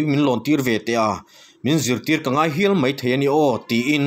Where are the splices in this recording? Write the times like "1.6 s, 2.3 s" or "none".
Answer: none